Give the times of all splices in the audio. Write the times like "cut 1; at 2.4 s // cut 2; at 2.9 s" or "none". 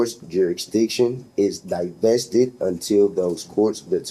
none